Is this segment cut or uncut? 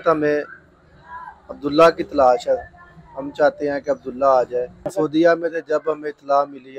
cut